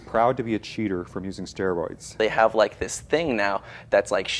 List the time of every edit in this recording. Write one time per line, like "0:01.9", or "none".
0:02.2